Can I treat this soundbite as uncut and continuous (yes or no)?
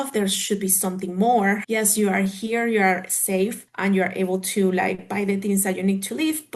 no